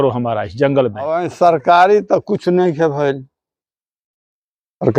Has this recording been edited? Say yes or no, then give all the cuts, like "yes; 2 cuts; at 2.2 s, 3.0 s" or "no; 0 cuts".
yes; 1 cut; at 1.3 s